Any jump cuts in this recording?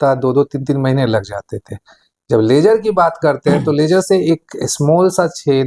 no; 0 cuts

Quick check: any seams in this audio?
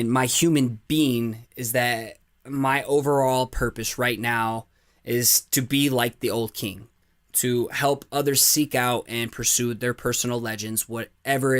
no; 0 cuts

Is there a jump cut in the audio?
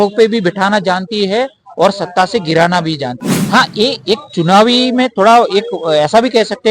yes; 1 cut; at 3.1 s

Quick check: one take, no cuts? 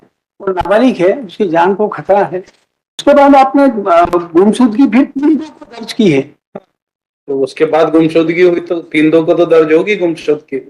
no; 1 cut; at 3.0 s

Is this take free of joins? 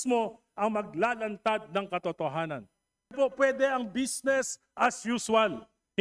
no; 1 cut; at 3.1 s

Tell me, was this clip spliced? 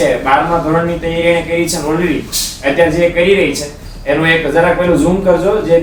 no; 0 cuts

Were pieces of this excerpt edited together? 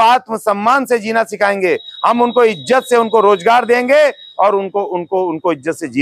no; 0 cuts

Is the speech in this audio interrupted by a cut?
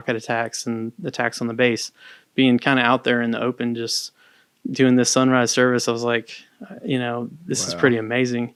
no; 0 cuts

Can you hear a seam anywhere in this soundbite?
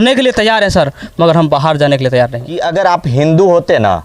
yes; 1 cut; at 2.6 s

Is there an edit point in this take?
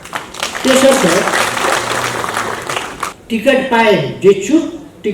yes; 1 cut; at 3.2 s

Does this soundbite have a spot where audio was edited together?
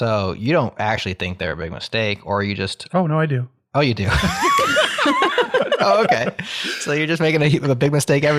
no; 0 cuts

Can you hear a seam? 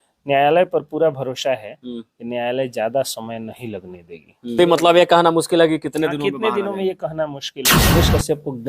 yes; 2 cuts; at 4.6 s, 7.9 s

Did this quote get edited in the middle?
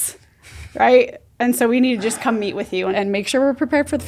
yes; 1 cut; at 2.9 s

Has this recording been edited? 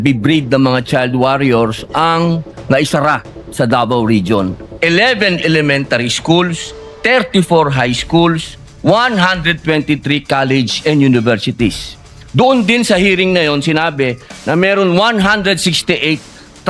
yes; 1 cut; at 4.6 s

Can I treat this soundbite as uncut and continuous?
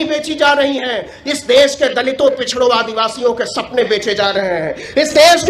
yes; 0 cuts

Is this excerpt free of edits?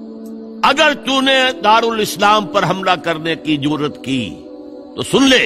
yes; 0 cuts

